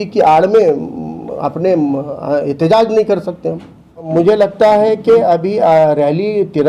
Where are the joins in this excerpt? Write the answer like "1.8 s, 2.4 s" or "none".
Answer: 4.0 s